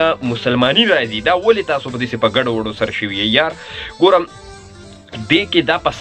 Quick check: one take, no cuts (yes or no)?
yes